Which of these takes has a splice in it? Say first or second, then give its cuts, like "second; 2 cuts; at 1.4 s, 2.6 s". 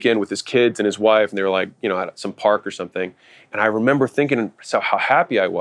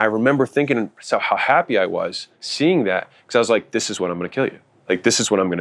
second; 1 cut; at 4.7 s